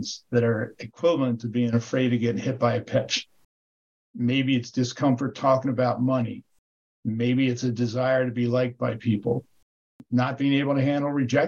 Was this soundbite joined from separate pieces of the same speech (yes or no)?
yes